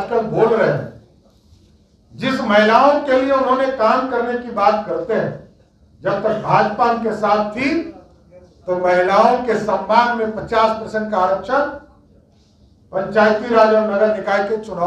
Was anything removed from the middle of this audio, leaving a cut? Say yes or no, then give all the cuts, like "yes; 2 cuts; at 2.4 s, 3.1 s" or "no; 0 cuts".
no; 0 cuts